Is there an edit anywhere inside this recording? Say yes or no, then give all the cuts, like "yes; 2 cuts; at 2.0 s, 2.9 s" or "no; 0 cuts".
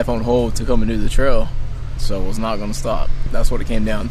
yes; 2 cuts; at 2.0 s, 3.2 s